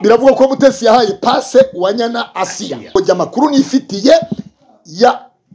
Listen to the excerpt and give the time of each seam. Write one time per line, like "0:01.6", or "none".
0:02.9